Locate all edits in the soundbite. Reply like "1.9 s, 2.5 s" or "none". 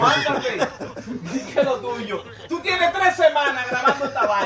none

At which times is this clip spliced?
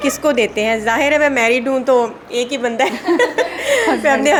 none

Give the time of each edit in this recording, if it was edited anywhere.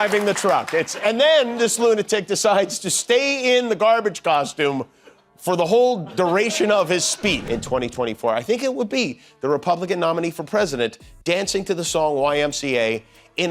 7.4 s

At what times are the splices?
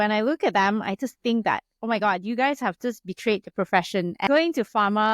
4.2 s

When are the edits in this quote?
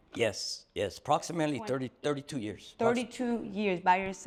none

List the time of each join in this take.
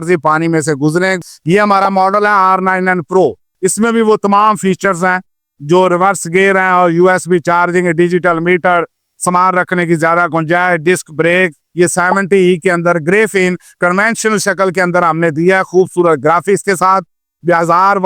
1.2 s, 11.6 s

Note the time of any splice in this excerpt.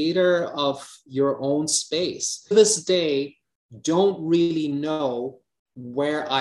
2.5 s

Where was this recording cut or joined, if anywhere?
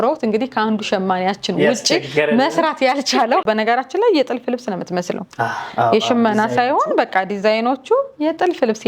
3.4 s

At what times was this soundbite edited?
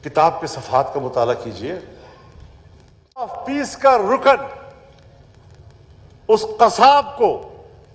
3.4 s

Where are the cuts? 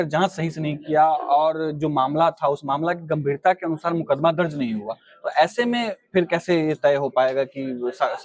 none

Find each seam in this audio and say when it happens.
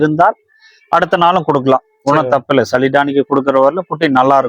none

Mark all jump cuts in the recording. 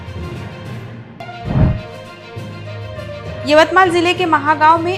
0.9 s

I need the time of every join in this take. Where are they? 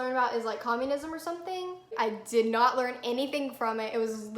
1.9 s

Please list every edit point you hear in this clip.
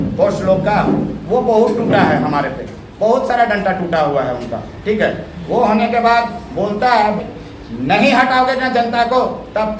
none

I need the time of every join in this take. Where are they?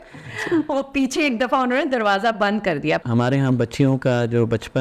3.0 s

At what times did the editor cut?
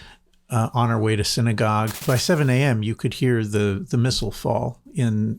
2.0 s

